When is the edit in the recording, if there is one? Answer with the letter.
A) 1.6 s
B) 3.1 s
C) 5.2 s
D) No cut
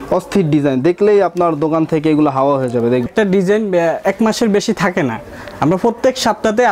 B